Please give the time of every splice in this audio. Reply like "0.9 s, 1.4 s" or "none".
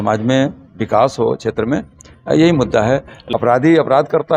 3.1 s